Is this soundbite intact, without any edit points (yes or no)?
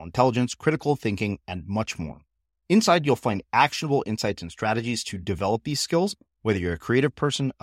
yes